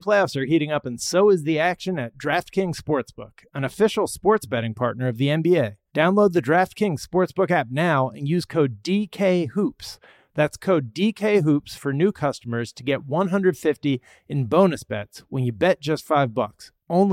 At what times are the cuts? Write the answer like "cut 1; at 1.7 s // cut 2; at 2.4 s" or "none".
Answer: cut 1; at 5.8 s